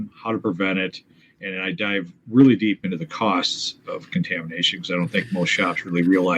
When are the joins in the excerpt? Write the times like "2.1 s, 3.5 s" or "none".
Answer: none